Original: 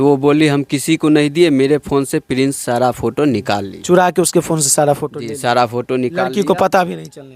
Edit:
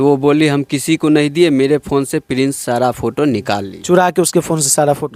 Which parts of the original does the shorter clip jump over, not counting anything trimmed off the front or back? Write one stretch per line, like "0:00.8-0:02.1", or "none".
none